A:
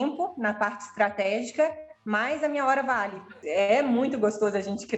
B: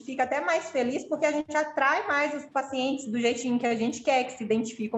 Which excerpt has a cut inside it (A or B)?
A